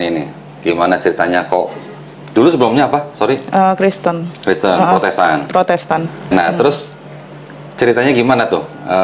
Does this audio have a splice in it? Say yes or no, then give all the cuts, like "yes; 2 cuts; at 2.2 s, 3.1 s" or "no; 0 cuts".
no; 0 cuts